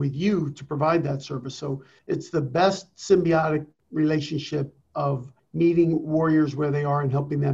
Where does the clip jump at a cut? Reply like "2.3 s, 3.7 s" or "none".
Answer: 1.9 s, 3.8 s, 5.1 s